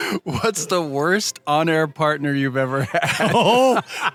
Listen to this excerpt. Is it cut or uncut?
uncut